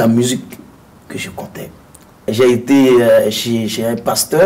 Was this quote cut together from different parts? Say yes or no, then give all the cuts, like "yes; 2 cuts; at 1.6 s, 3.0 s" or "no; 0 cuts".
yes; 1 cut; at 2.3 s